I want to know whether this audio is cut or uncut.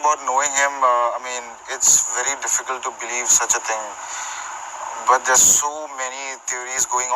cut